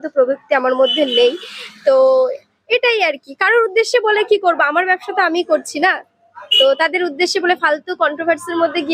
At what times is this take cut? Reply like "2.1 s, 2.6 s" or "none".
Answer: none